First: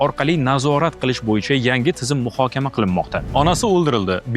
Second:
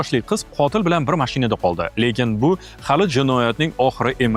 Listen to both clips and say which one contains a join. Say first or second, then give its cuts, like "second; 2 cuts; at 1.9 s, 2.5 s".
first; 1 cut; at 3.2 s